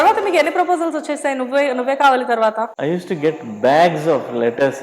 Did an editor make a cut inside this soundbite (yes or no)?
yes